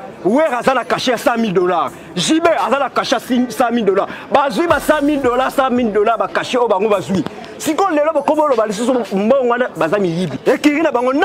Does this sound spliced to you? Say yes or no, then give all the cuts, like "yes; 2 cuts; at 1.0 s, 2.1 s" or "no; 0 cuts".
yes; 1 cut; at 10.3 s